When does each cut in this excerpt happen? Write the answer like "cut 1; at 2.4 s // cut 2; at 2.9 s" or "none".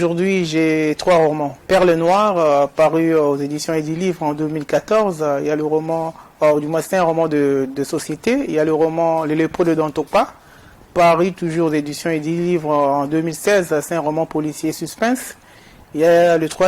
cut 1; at 1.6 s